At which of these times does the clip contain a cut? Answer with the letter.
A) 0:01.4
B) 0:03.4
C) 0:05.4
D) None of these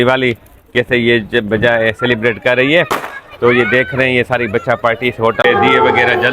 C